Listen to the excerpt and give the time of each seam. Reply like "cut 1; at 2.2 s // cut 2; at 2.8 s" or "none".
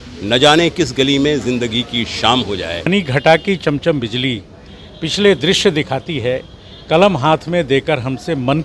cut 1; at 2.8 s